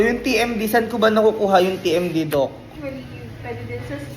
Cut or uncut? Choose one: cut